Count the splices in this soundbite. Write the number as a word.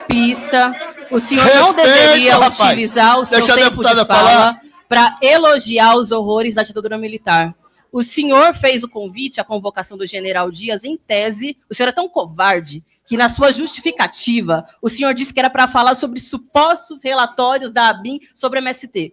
zero